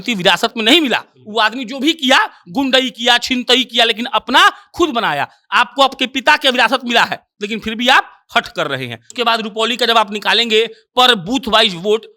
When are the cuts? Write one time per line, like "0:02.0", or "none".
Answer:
0:09.0